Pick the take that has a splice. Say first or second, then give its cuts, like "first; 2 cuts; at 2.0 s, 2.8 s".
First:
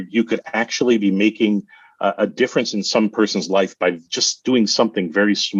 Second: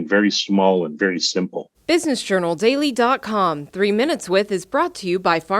second; 1 cut; at 1.7 s